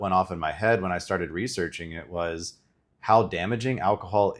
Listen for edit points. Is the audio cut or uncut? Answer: uncut